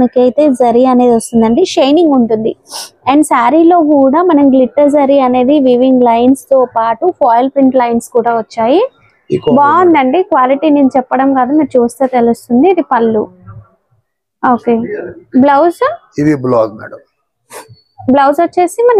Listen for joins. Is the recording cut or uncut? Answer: uncut